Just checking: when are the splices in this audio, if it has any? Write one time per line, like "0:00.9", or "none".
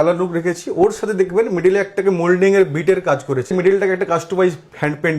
0:03.5